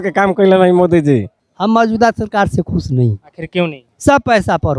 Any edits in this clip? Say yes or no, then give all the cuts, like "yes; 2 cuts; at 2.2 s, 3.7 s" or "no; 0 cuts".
yes; 1 cut; at 3.9 s